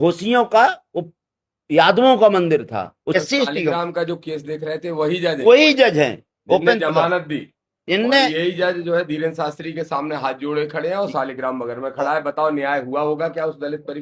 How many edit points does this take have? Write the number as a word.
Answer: one